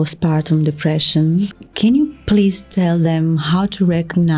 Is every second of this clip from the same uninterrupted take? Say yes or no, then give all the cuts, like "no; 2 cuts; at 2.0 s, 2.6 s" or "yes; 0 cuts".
no; 1 cut; at 1.6 s